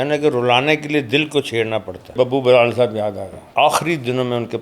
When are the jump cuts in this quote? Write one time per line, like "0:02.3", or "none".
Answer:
0:02.1
0:03.3